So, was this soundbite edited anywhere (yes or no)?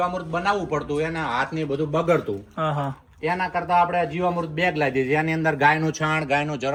no